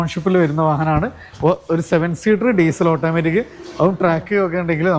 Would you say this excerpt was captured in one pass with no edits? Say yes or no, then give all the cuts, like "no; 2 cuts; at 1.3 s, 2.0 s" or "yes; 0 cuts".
yes; 0 cuts